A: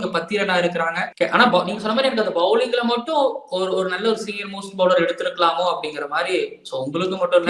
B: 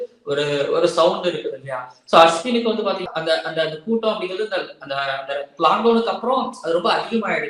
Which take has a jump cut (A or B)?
A